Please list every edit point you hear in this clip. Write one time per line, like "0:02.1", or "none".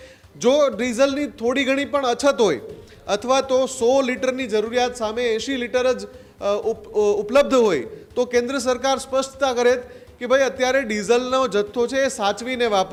none